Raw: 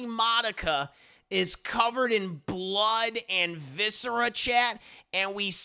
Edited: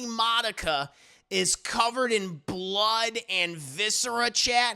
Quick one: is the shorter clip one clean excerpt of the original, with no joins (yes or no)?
yes